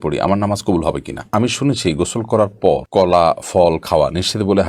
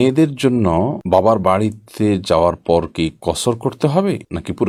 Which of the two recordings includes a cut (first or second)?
first